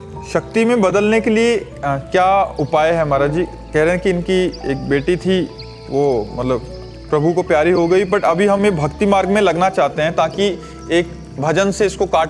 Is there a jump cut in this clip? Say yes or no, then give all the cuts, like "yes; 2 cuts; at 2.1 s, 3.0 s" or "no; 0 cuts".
no; 0 cuts